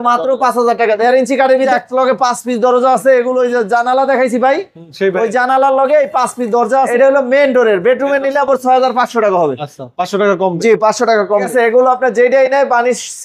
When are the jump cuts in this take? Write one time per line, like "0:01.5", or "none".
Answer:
0:01.7
0:06.9
0:11.5